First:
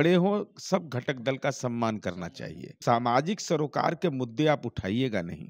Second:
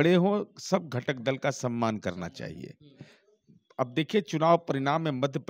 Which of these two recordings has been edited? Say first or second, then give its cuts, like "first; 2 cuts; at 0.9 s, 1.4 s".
first; 1 cut; at 2.8 s